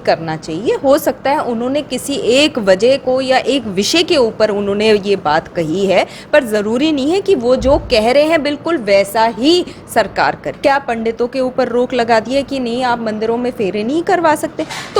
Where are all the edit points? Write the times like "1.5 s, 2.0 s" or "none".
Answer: 10.5 s